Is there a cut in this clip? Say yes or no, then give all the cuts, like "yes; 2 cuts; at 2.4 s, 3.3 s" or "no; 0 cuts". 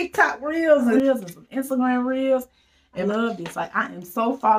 yes; 2 cuts; at 1.0 s, 3.0 s